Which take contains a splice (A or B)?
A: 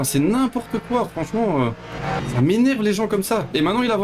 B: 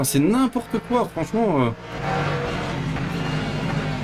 A